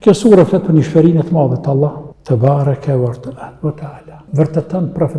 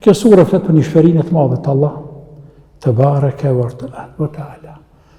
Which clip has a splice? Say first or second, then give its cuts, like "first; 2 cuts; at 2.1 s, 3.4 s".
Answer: first; 2 cuts; at 2.1 s, 4.2 s